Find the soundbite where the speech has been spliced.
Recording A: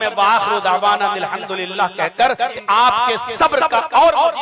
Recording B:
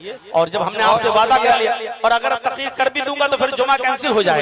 A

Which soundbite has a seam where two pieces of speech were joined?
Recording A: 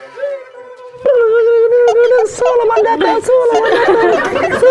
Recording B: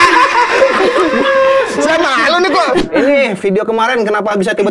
B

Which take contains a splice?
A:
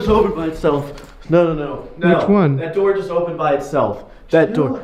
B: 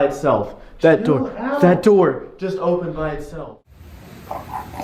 B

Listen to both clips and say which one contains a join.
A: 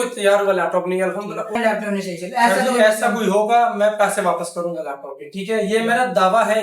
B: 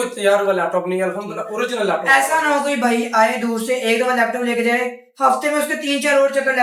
A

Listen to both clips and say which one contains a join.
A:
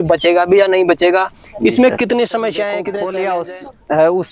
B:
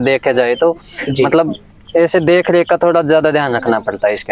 A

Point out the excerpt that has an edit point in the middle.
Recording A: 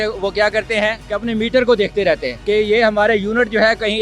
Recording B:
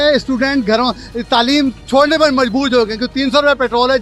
A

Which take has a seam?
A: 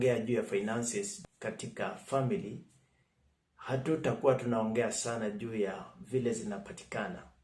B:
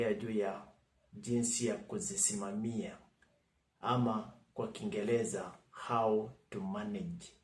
A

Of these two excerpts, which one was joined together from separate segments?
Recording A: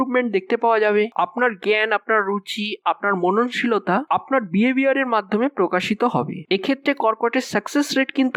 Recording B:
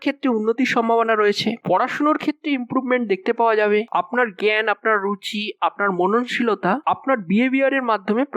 B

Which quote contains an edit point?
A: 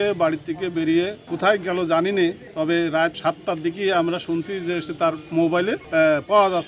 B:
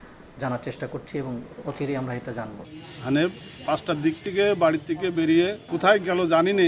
B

